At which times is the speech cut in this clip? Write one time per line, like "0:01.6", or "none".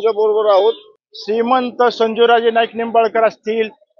0:00.9